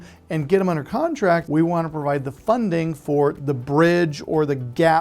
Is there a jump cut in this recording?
yes; 1 cut; at 1.4 s

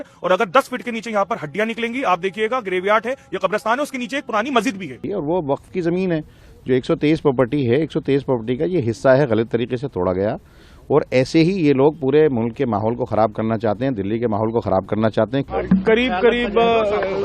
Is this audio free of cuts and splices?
no; 2 cuts; at 5.0 s, 15.5 s

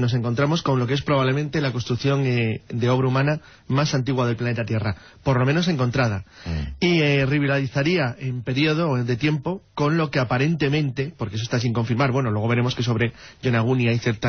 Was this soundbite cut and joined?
no; 0 cuts

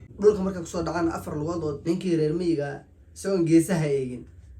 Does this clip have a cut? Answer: yes; 1 cut; at 1.8 s

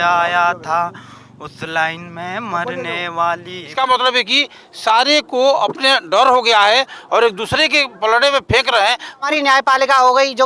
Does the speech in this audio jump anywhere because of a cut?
yes; 2 cuts; at 3.7 s, 9.3 s

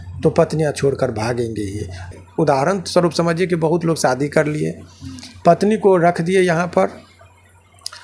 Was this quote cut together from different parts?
yes; 1 cut; at 2.1 s

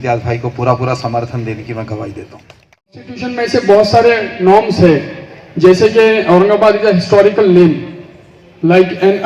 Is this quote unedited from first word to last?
no; 1 cut; at 3.2 s

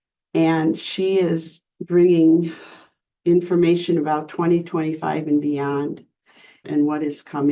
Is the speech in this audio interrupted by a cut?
yes; 1 cut; at 6.6 s

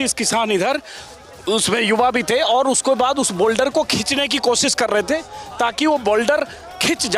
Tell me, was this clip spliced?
no; 0 cuts

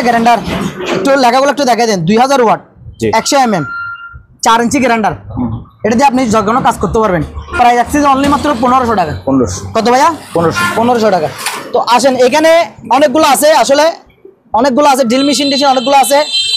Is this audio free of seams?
yes; 0 cuts

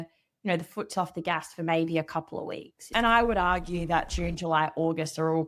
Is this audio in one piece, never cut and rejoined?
yes; 0 cuts

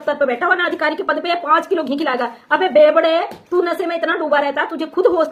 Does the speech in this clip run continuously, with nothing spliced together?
yes; 0 cuts

